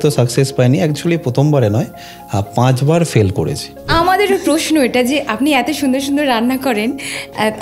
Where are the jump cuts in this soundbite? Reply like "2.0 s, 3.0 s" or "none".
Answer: 3.9 s

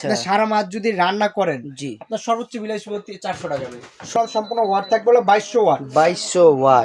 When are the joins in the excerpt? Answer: 4.1 s

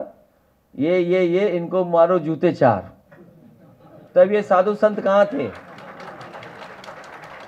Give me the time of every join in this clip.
none

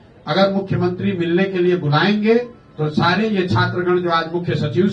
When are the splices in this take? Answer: none

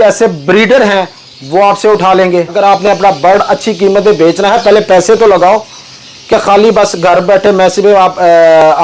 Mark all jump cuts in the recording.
2.5 s

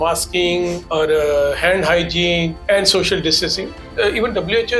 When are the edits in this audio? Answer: 0.8 s, 2.6 s, 3.8 s

